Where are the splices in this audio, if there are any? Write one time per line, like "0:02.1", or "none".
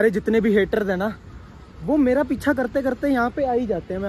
none